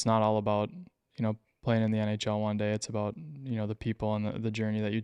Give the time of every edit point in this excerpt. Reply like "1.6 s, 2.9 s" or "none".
none